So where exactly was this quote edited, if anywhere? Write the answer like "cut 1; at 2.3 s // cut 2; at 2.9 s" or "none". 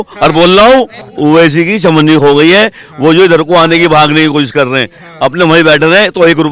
cut 1; at 1.1 s